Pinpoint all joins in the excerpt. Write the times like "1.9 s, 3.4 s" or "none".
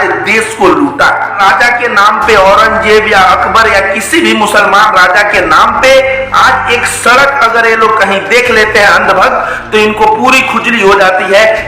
1.3 s

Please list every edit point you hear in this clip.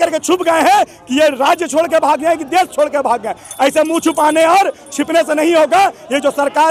none

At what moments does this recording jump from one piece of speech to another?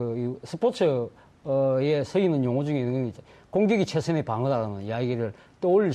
1.0 s

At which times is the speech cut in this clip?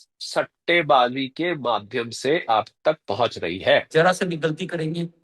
3.9 s

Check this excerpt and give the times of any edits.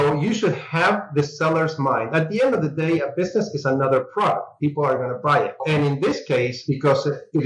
5.6 s, 6.6 s

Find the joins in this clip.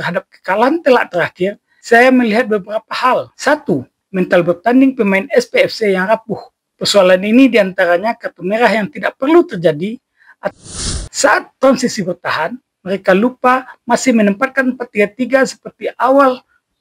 10.5 s

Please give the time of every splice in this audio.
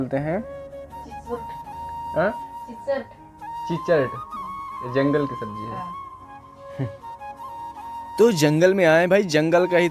none

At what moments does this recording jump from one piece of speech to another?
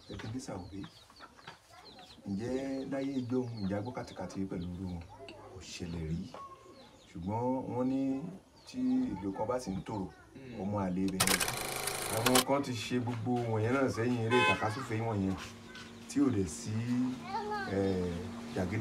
11.5 s

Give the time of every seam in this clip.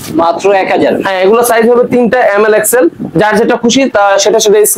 none

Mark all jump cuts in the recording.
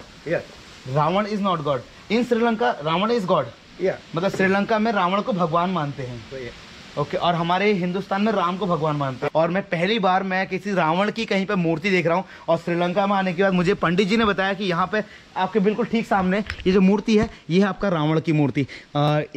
none

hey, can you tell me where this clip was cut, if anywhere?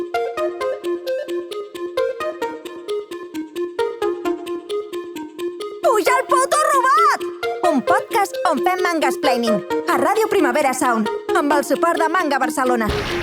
none

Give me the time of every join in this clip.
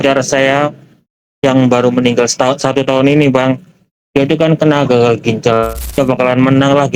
6.0 s

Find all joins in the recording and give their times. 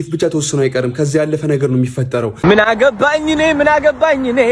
2.5 s

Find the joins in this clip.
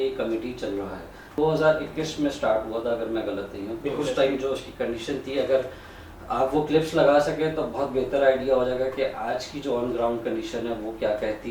1.4 s

